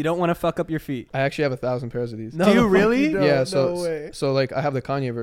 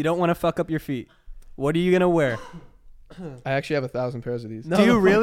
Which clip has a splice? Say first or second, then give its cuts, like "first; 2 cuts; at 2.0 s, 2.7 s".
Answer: first; 1 cut; at 1.1 s